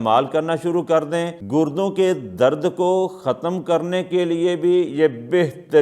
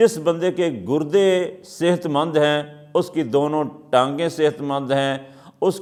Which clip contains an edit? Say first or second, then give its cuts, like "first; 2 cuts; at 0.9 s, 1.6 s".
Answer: first; 1 cut; at 1.4 s